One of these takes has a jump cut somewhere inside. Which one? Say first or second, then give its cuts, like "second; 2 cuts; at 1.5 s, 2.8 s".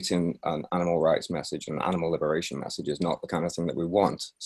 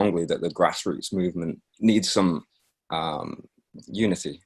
second; 1 cut; at 1.6 s